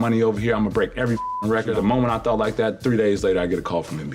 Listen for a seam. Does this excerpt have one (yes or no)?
yes